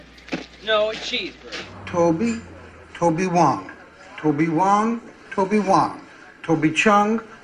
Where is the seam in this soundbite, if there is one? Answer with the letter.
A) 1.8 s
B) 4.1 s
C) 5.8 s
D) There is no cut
D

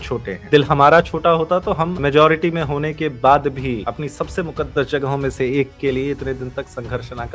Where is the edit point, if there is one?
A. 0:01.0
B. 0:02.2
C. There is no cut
C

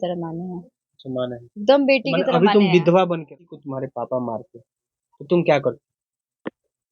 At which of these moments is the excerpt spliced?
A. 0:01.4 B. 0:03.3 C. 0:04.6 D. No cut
B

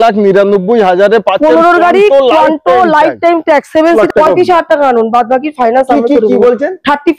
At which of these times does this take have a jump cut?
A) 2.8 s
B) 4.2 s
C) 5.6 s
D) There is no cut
B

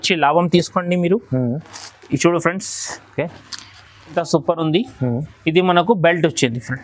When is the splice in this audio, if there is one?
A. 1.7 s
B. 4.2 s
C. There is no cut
B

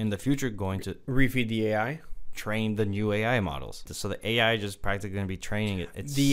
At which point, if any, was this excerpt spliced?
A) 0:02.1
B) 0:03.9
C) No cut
B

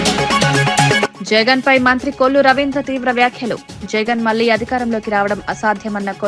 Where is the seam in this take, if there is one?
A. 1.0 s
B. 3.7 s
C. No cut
A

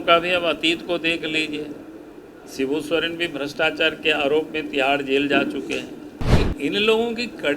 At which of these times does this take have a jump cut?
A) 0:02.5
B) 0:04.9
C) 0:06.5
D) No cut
C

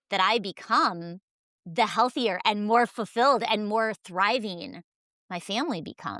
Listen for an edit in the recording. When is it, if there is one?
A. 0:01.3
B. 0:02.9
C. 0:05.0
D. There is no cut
D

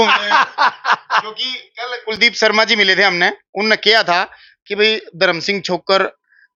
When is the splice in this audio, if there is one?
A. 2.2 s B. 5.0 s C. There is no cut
C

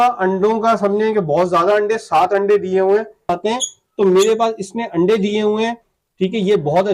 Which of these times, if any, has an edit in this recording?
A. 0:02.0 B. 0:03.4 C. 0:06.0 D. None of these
B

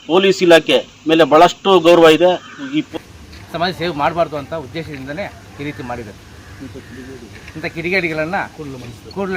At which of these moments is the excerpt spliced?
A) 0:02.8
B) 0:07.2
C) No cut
A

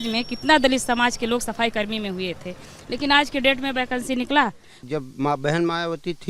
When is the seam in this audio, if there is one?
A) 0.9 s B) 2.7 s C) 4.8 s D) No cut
C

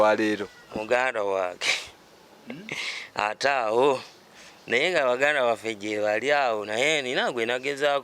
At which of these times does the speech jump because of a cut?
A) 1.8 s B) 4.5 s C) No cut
C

